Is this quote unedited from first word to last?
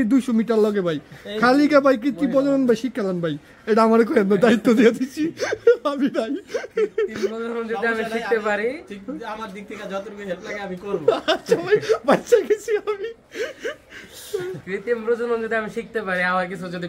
yes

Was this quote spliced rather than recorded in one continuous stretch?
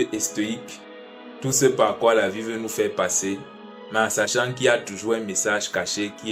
no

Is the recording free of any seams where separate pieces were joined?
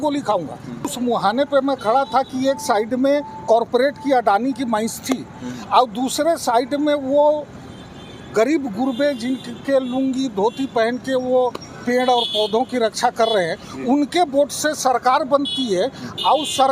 no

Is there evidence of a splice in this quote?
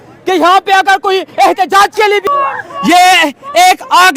yes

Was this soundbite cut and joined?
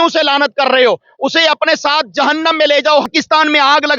yes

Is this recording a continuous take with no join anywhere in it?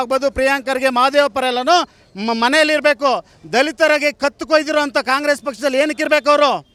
yes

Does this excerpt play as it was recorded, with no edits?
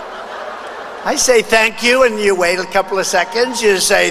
yes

